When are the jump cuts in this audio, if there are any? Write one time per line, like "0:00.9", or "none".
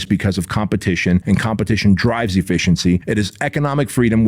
0:01.2
0:03.0